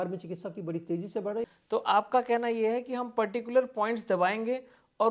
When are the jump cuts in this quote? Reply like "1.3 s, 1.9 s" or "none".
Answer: 1.4 s

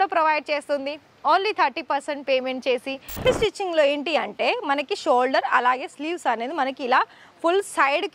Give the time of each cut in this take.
3.2 s

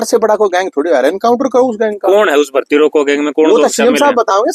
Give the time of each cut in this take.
none

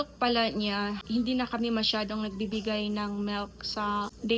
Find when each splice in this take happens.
1.0 s

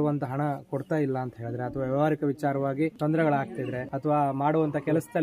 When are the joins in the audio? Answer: 3.0 s, 3.8 s

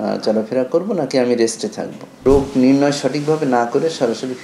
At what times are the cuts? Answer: 2.2 s

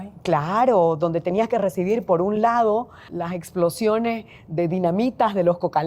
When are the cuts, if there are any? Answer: 3.1 s

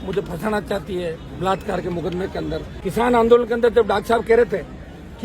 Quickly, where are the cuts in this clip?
2.7 s

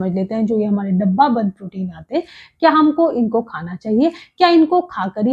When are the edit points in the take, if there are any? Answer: none

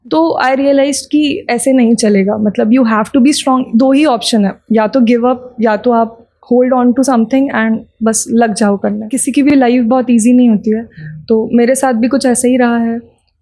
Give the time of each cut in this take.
9.1 s

